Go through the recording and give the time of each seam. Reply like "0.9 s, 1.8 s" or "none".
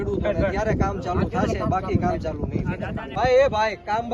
3.2 s